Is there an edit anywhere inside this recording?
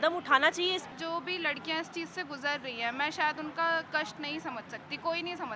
yes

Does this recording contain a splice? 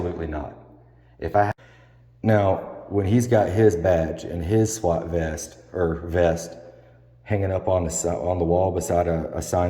yes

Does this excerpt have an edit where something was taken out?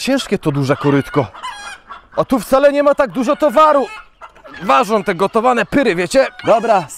no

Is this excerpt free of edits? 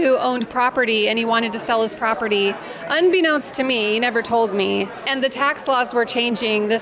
yes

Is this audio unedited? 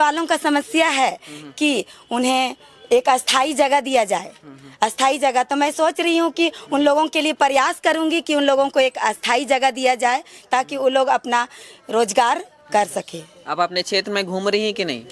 yes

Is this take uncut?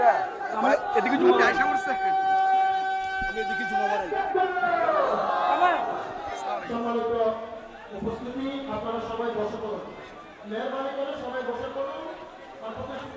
yes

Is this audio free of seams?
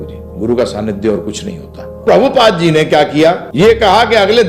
no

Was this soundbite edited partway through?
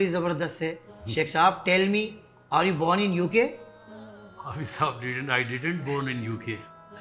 no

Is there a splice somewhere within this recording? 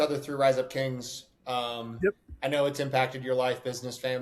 no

